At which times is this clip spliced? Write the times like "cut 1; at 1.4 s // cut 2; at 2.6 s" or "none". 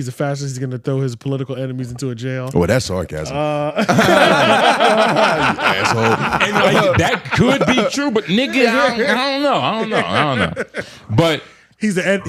none